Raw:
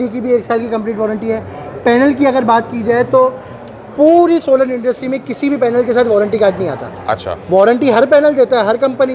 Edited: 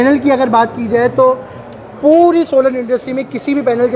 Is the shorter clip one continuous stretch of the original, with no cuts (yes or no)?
yes